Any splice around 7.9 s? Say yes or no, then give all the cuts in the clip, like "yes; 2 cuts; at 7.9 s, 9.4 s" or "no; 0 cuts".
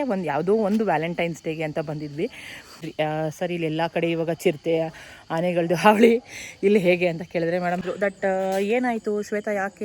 yes; 2 cuts; at 2.9 s, 7.9 s